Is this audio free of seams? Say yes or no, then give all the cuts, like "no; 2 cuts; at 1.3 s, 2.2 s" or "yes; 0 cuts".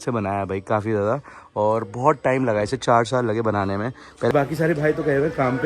no; 1 cut; at 4.3 s